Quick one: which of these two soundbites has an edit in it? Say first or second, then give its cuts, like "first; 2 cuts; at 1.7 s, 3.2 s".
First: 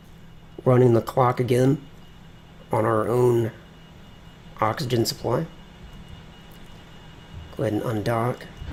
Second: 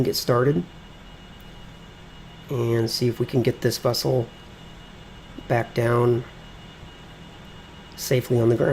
second; 1 cut; at 5.1 s